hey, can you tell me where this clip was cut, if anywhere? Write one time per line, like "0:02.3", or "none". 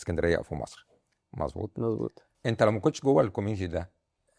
0:02.3